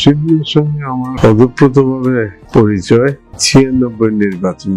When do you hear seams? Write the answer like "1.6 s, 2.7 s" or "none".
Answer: 1.1 s, 2.4 s, 3.3 s